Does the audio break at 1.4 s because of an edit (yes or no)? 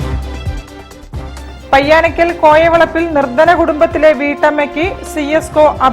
yes